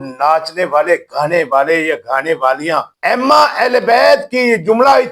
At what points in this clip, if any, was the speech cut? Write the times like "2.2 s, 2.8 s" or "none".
none